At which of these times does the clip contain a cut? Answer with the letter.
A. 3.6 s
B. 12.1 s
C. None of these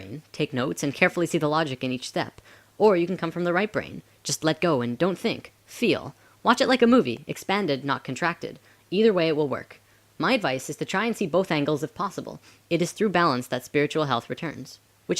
B